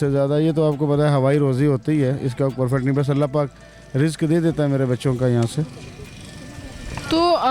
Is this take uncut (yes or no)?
yes